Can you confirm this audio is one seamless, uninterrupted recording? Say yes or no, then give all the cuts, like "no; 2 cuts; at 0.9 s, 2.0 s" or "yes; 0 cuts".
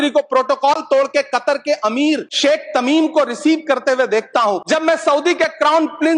no; 2 cuts; at 2.3 s, 4.6 s